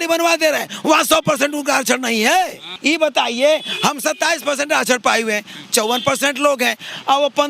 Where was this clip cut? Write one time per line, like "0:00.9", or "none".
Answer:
0:02.7